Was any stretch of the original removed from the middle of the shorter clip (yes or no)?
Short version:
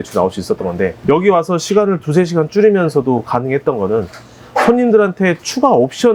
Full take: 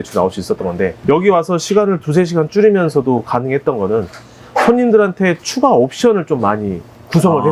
no